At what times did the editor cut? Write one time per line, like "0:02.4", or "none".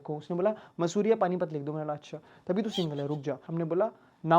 0:03.4